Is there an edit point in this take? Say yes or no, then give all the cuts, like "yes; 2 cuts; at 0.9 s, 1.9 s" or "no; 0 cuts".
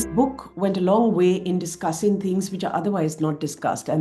no; 0 cuts